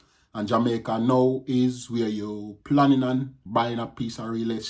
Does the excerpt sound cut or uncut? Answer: cut